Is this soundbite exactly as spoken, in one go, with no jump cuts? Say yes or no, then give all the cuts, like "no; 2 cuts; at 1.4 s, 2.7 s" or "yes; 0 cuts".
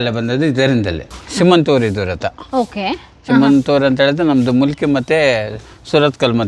no; 1 cut; at 1.1 s